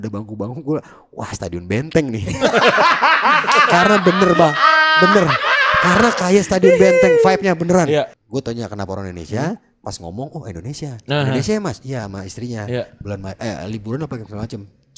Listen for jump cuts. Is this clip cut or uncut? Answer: cut